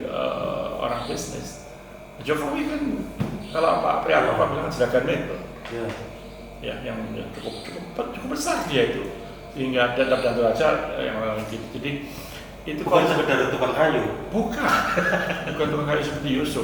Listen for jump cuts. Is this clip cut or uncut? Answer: uncut